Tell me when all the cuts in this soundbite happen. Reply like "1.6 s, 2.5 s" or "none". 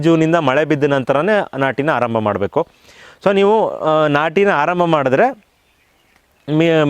none